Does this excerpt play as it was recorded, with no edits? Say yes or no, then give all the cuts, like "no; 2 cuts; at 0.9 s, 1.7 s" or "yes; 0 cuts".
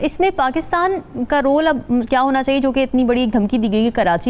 yes; 0 cuts